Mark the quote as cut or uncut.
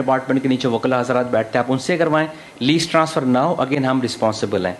uncut